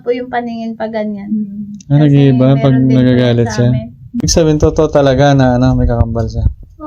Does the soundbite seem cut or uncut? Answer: cut